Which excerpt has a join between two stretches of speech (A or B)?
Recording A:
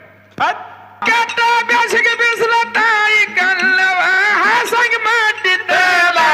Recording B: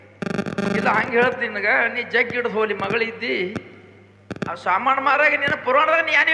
A